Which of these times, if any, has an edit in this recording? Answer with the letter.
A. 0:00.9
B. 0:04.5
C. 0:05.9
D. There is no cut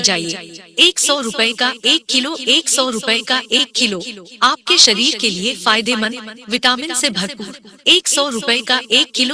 D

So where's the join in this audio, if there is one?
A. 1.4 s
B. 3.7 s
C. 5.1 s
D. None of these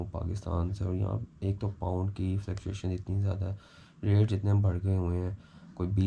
D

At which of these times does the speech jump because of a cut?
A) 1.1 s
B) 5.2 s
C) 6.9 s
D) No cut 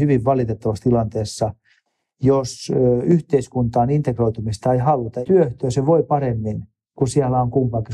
B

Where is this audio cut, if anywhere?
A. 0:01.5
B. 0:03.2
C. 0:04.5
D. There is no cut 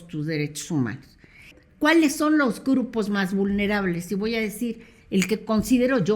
A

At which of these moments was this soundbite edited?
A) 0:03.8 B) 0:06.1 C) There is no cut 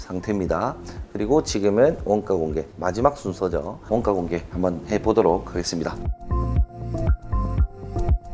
B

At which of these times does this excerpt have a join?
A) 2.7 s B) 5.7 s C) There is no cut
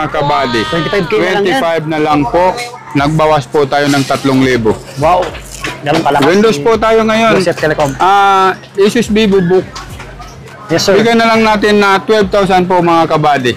A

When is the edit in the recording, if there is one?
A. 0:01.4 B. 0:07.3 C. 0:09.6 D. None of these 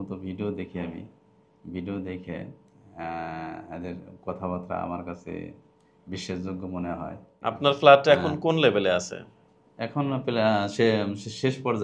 B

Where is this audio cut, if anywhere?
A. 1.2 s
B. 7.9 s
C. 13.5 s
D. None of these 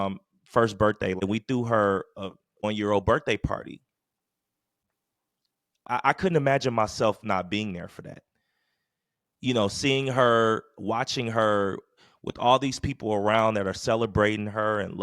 A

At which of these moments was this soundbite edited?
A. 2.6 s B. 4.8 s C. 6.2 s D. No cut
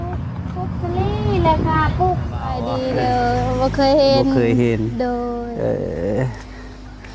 A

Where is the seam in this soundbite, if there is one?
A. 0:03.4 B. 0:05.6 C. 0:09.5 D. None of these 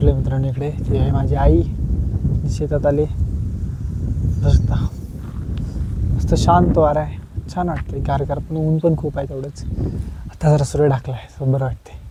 D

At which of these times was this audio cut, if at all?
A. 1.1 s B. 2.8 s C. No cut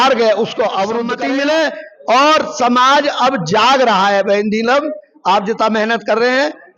A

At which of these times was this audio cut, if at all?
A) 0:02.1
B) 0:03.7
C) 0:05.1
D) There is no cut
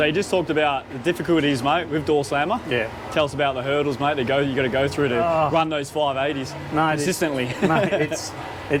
D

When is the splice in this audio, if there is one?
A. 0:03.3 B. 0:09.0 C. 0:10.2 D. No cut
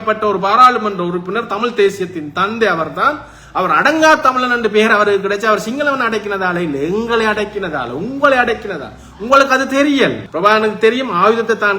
C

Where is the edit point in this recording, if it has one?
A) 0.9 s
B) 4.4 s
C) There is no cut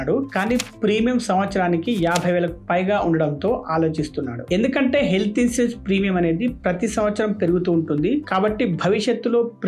C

